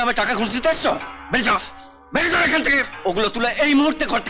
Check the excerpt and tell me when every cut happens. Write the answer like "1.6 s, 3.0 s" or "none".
2.9 s